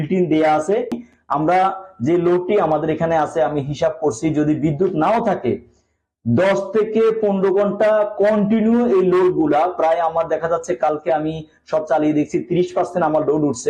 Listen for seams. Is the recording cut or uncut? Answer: cut